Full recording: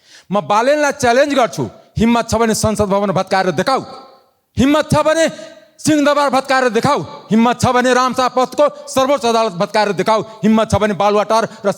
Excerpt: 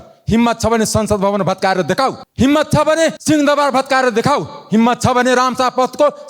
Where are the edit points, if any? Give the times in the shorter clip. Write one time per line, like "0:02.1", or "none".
0:02.2
0:03.2